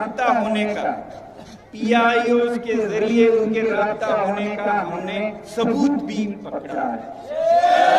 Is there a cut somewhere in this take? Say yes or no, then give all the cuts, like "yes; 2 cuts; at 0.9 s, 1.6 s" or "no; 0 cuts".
no; 0 cuts